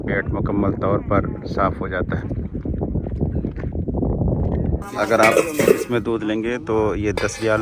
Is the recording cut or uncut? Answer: cut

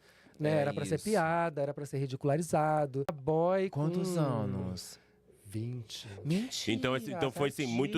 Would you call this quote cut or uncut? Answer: cut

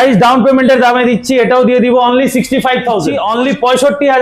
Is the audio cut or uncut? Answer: cut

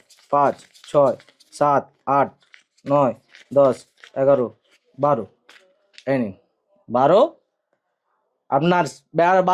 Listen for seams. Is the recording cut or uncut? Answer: uncut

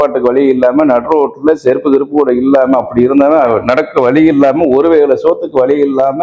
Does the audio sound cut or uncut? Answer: uncut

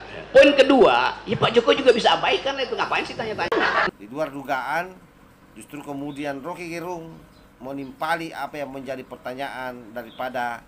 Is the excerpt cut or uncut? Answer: cut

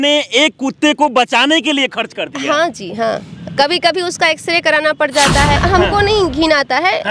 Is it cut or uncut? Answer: cut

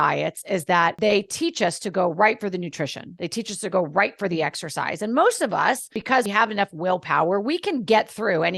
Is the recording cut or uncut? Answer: cut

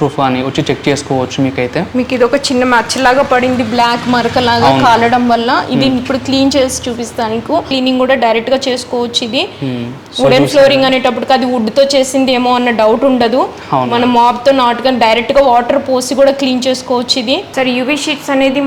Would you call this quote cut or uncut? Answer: cut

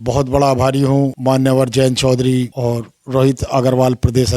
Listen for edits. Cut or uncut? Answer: cut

